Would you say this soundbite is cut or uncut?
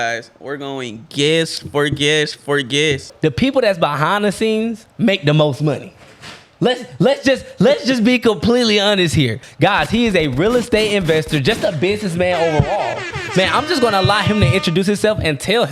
cut